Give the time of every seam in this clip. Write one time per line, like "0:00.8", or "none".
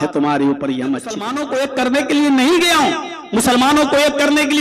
0:01.3